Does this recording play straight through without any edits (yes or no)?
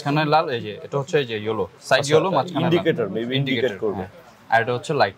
yes